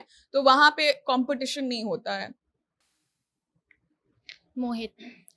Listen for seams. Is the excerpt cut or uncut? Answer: uncut